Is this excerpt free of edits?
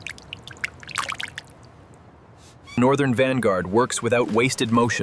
no; 1 cut; at 2.7 s

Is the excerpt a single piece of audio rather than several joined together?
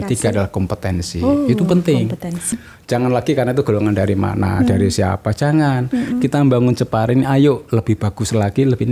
no; 1 cut; at 2.6 s

